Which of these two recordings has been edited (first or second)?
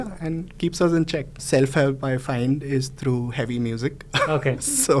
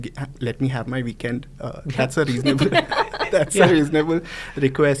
first